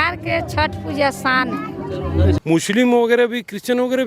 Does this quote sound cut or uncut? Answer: cut